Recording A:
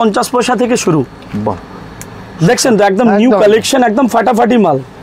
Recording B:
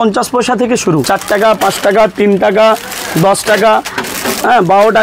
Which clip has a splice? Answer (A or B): B